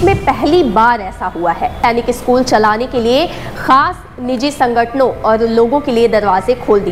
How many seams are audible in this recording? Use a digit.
1